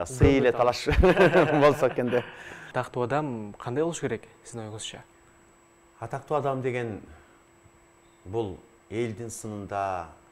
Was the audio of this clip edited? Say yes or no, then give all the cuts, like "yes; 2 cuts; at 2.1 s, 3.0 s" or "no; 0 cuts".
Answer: yes; 1 cut; at 2.6 s